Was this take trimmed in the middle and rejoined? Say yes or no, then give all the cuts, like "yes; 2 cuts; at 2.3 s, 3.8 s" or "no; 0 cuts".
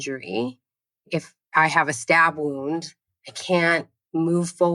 yes; 1 cut; at 1.4 s